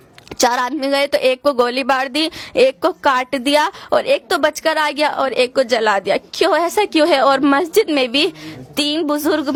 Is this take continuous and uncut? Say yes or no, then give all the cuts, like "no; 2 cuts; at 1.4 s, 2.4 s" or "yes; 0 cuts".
yes; 0 cuts